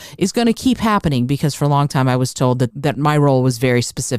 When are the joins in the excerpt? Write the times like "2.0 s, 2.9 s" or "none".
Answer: 2.7 s